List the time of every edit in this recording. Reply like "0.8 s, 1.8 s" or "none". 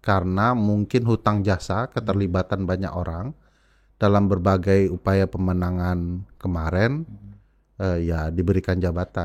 none